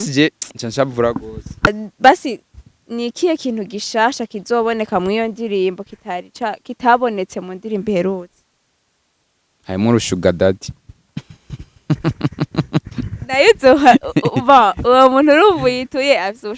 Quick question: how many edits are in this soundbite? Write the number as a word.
one